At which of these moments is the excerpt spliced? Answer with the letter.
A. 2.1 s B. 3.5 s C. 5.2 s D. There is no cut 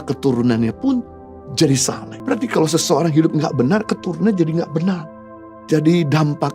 A